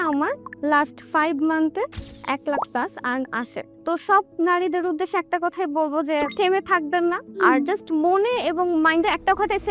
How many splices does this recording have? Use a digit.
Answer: 1